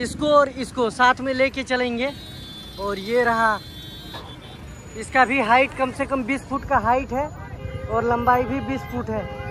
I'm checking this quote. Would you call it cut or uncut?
uncut